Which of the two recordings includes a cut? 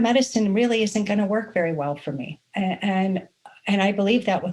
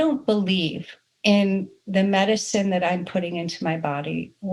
first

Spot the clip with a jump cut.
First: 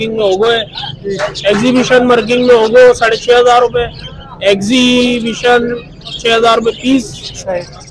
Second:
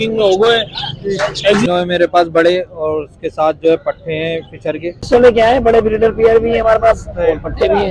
second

